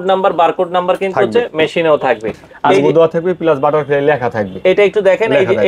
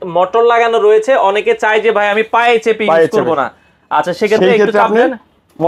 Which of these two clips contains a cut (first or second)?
first